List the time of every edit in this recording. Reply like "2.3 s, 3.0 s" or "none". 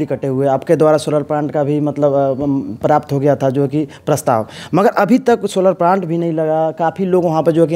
none